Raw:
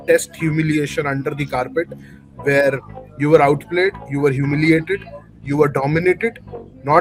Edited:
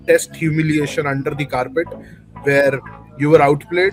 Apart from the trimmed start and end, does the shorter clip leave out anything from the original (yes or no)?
no